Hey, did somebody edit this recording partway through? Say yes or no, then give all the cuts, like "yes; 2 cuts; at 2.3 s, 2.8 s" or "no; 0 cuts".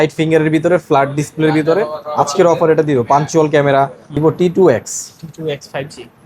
yes; 1 cut; at 4.2 s